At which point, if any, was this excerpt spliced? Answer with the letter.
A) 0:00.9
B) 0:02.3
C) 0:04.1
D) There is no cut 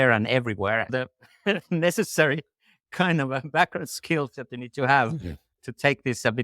A